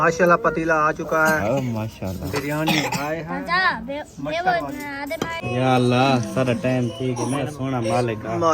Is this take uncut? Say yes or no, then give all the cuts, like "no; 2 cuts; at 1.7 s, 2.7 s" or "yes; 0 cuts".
no; 1 cut; at 5.4 s